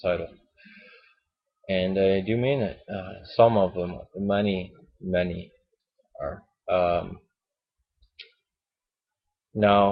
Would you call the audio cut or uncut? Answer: cut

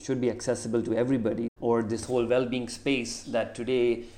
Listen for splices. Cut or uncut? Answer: cut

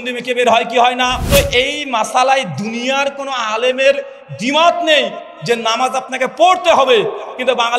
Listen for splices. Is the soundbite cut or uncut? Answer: cut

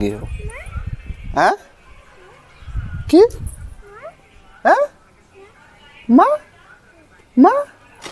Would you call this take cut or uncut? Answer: uncut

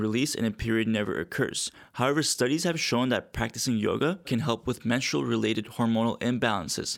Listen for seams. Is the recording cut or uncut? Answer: uncut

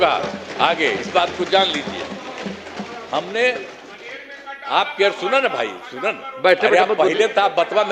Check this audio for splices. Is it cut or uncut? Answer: uncut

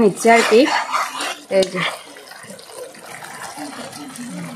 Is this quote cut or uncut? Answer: uncut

